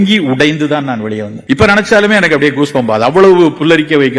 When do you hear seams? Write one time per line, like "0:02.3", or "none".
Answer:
0:01.3